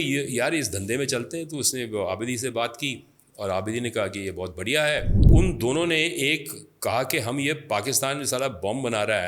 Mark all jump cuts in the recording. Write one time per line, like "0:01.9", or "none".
0:05.3